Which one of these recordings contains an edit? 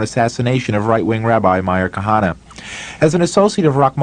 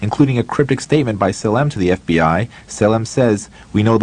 first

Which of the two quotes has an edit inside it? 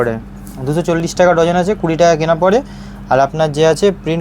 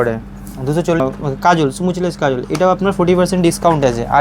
second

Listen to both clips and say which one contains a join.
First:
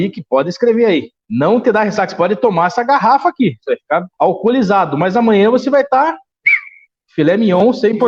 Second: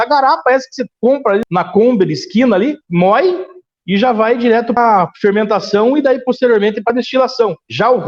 second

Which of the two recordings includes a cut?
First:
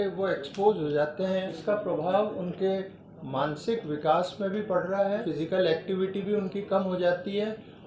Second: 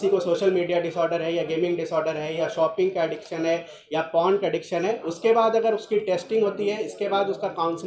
first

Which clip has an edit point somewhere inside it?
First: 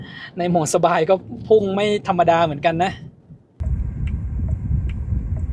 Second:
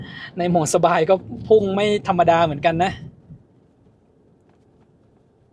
first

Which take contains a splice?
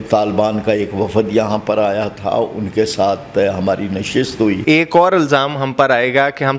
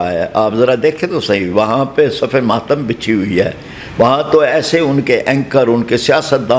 first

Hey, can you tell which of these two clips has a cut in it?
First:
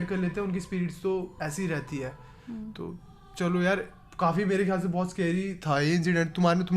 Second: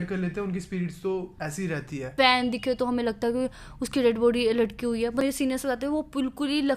second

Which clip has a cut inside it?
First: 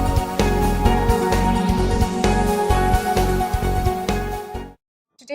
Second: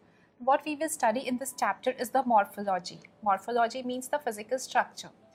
first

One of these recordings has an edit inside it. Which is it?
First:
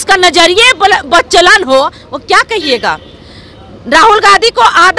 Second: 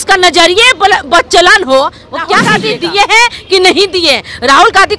second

